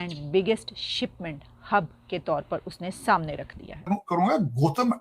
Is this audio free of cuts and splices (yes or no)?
no